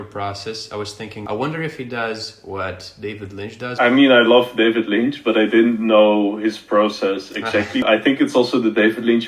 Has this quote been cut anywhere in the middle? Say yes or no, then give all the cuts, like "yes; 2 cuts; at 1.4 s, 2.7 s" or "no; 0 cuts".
yes; 3 cuts; at 1.2 s, 3.7 s, 7.8 s